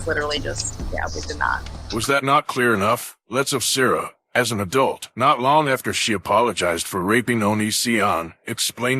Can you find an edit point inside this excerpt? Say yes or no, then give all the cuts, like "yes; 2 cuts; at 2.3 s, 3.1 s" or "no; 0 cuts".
no; 0 cuts